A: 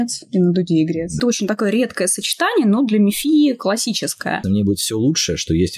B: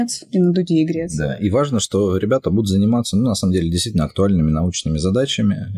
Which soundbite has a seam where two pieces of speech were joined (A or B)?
A